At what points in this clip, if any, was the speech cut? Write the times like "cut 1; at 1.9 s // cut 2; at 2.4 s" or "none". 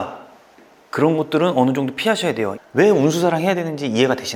cut 1; at 2.5 s